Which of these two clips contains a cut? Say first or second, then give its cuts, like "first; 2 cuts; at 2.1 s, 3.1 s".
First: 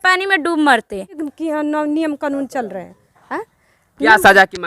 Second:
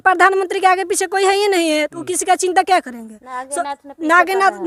first; 1 cut; at 1.2 s